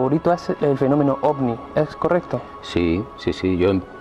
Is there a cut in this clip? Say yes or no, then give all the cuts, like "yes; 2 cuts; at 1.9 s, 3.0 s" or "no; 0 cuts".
no; 0 cuts